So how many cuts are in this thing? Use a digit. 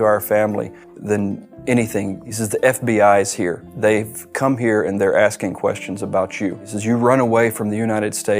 2